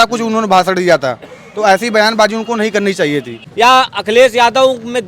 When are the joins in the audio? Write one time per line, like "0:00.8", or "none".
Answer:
0:03.4